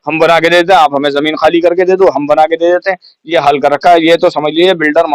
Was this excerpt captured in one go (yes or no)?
yes